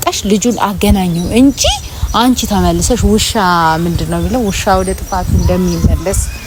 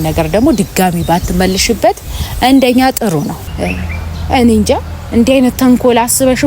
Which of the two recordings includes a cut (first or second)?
second